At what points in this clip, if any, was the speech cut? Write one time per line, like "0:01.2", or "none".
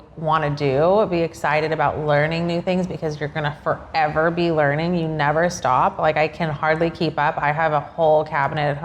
none